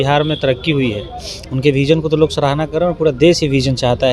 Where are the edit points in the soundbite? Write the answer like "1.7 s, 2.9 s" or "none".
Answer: none